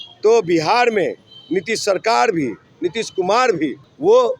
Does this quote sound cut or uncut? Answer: uncut